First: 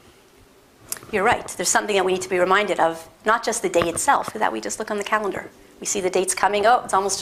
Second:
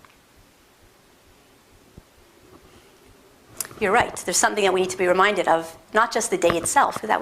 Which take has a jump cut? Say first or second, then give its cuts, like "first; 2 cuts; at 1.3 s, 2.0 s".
second; 1 cut; at 1.1 s